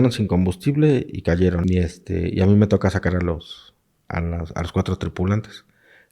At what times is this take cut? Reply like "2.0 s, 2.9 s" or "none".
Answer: 1.6 s